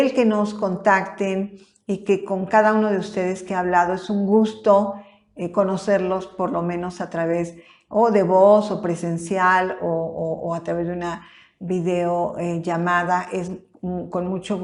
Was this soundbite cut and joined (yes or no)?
no